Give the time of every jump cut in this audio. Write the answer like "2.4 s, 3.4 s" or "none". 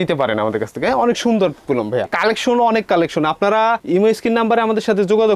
2.1 s